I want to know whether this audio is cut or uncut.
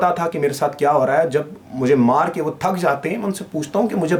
uncut